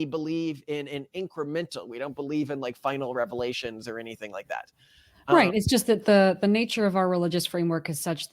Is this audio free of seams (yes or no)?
yes